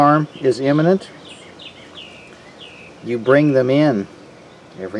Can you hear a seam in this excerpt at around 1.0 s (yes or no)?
no